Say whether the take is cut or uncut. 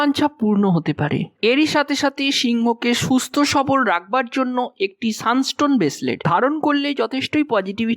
cut